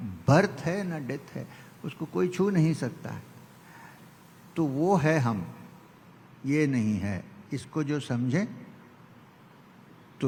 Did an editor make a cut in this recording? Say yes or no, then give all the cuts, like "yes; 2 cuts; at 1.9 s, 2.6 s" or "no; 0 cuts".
no; 0 cuts